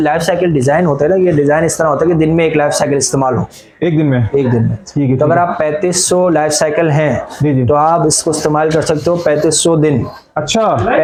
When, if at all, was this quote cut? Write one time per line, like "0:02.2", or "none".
none